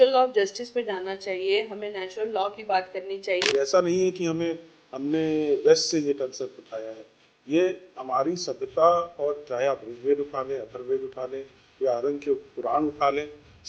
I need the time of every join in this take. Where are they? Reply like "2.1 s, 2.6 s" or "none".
3.5 s